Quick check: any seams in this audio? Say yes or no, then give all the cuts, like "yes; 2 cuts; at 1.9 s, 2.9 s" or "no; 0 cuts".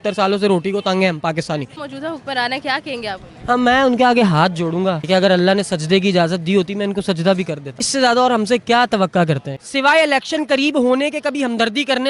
yes; 4 cuts; at 1.8 s, 5.0 s, 7.7 s, 9.5 s